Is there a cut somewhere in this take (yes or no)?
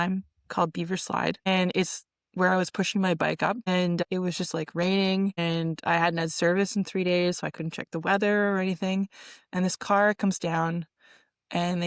yes